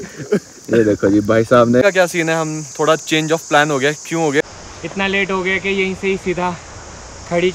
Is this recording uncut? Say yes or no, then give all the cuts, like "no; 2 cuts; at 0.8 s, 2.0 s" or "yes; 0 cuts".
no; 2 cuts; at 1.8 s, 4.4 s